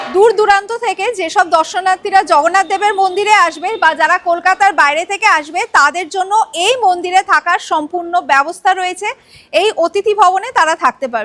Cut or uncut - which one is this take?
uncut